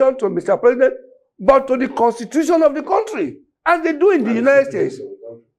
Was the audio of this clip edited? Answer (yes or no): no